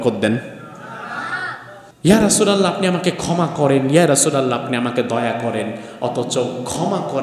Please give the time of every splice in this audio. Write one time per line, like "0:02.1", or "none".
0:01.9